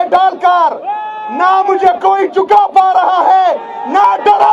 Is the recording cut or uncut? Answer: uncut